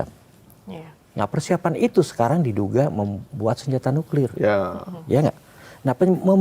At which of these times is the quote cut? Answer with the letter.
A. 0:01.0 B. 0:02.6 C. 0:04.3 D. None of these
D